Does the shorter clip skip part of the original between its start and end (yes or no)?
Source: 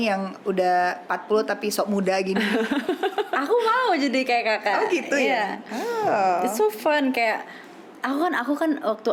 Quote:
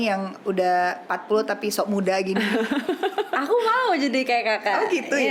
no